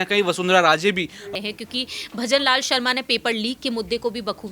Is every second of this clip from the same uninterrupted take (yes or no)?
no